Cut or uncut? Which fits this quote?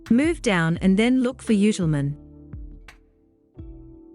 cut